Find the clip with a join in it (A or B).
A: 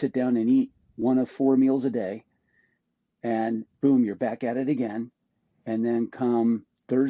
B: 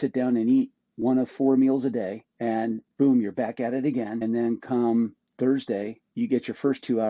B